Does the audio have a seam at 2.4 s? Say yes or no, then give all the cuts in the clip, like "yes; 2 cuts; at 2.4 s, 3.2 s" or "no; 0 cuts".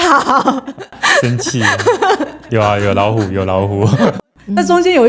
yes; 2 cuts; at 2.4 s, 4.1 s